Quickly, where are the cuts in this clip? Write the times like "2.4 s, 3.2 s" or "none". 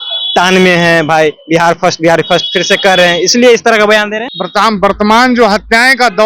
4.2 s